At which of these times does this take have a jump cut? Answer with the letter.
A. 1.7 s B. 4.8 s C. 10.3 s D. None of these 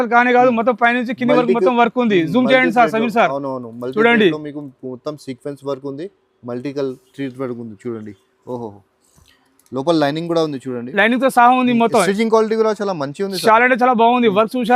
D